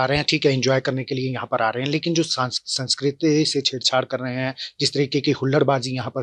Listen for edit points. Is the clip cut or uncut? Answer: uncut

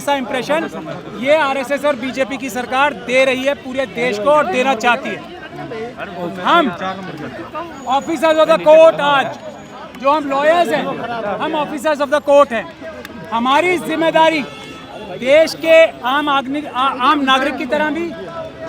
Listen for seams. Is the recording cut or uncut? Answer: uncut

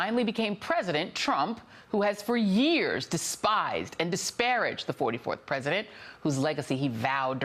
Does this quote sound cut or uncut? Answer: uncut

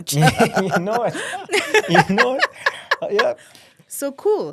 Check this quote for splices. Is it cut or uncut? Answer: uncut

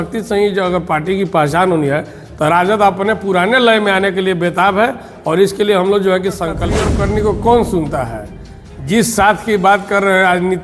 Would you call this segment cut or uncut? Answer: cut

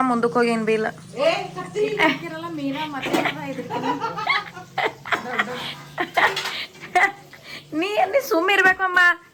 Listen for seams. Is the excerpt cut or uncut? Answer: uncut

